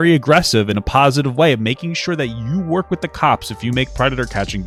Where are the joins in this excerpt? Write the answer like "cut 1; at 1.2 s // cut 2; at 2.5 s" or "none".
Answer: none